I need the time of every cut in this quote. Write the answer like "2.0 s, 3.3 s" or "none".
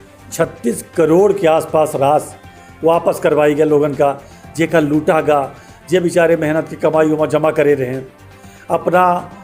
none